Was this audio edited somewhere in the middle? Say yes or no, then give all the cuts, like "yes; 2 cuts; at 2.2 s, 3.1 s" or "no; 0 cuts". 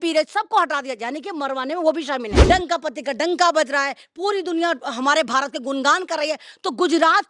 yes; 1 cut; at 2.3 s